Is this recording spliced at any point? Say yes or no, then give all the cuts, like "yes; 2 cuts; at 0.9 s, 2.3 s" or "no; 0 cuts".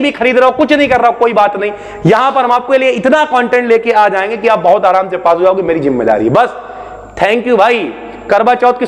no; 0 cuts